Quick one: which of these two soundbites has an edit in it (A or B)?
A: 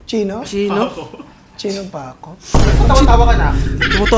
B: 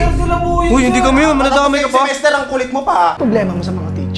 B